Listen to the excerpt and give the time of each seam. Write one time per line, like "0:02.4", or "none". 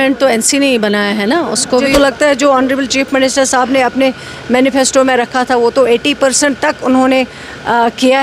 0:01.9